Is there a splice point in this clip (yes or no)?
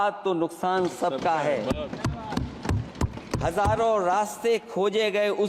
no